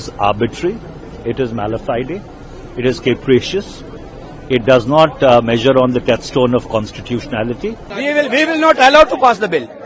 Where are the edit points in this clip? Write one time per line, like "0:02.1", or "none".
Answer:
0:07.9

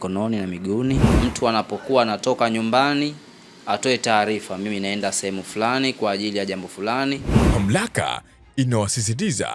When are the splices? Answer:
0:01.1
0:07.4

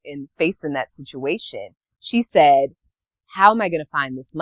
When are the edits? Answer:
none

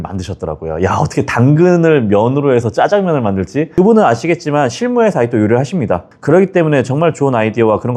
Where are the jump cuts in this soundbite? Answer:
none

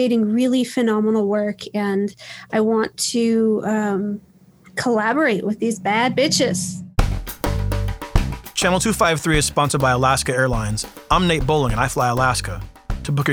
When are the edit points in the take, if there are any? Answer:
0:07.0

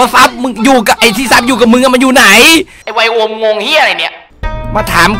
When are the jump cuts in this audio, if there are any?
0:02.8

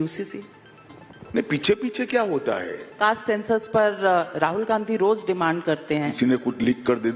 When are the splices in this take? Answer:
0:02.8
0:06.1

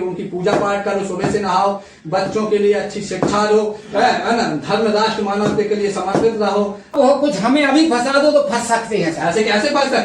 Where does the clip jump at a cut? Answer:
0:06.9

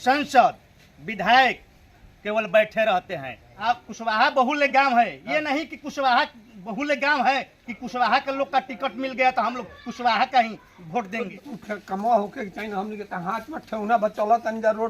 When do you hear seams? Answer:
0:03.6
0:11.3

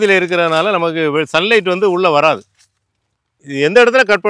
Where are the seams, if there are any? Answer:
0:03.4

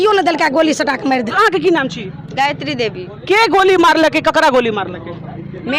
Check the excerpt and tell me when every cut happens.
none

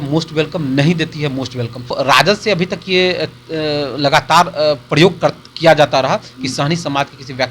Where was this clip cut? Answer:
0:01.9

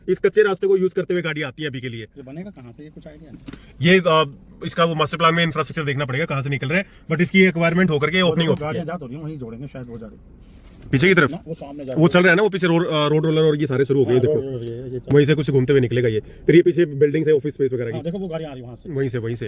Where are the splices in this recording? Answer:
none

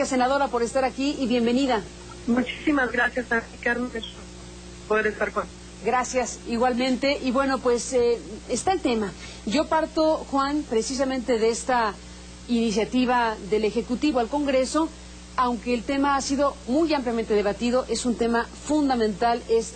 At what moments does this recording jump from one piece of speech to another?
0:15.7

